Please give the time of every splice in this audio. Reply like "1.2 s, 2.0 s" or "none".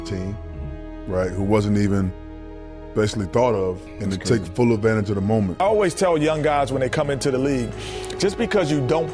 3.9 s, 5.6 s